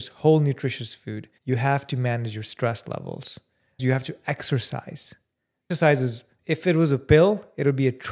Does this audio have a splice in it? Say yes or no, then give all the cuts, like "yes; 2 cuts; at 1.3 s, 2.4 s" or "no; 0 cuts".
yes; 2 cuts; at 3.8 s, 5.7 s